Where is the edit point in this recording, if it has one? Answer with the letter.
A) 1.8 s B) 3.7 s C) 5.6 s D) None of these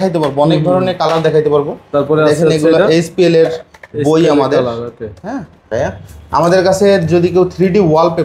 C